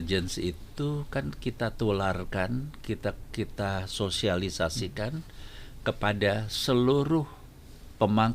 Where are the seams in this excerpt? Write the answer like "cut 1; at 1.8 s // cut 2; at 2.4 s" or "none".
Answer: none